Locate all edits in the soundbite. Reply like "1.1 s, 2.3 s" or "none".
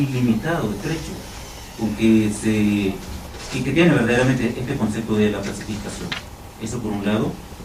none